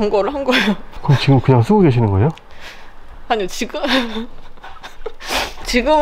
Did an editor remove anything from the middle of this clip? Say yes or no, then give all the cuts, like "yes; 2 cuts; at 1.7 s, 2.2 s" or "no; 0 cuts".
no; 0 cuts